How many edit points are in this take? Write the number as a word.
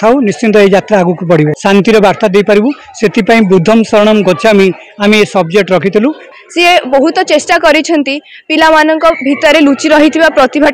two